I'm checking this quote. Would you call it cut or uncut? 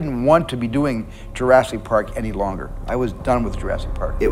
uncut